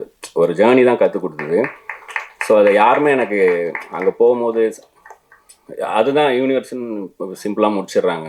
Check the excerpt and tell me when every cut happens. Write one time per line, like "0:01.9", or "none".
none